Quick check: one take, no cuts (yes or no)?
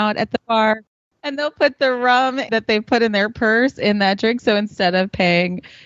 no